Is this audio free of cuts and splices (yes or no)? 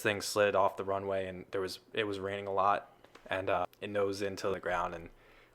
no